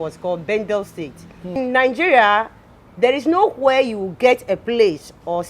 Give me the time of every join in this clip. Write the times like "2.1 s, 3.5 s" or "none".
1.6 s

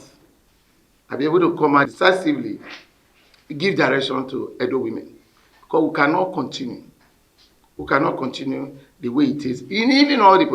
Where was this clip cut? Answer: 1.9 s

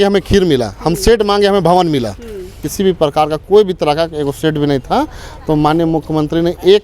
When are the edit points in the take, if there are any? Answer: 2.6 s

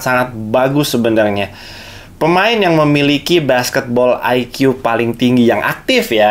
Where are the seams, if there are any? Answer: none

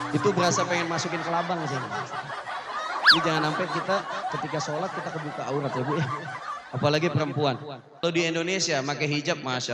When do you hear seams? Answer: 8.0 s

